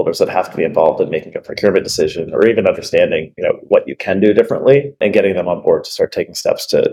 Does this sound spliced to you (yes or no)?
yes